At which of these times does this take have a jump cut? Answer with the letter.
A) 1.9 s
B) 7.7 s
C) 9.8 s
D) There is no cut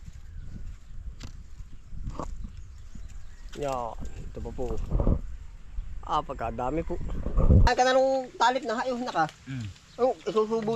B